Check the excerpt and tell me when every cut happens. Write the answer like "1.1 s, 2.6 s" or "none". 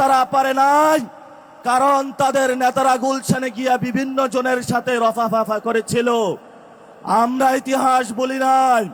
none